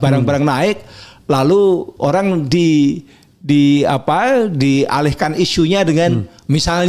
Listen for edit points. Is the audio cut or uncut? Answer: uncut